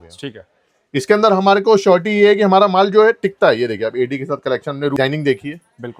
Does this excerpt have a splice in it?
yes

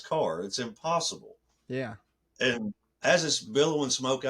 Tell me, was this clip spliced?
no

